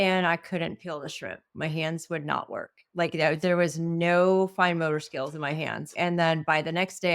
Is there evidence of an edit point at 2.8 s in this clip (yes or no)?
no